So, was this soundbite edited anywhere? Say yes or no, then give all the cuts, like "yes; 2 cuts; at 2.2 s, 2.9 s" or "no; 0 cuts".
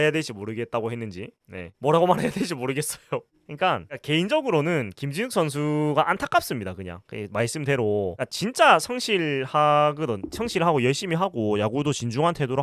no; 0 cuts